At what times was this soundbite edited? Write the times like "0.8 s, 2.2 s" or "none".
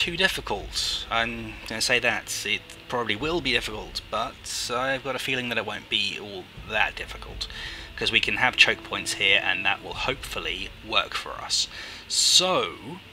11.6 s